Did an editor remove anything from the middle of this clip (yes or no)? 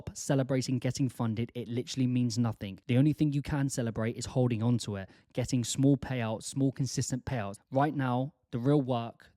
yes